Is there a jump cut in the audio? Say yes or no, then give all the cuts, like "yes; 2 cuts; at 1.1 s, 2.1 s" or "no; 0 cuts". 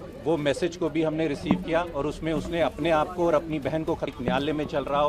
yes; 1 cut; at 4.1 s